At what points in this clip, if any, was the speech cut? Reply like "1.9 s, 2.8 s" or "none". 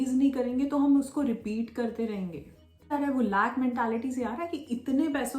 2.9 s